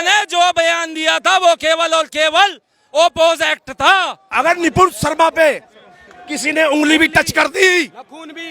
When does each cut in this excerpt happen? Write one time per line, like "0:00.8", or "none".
0:04.3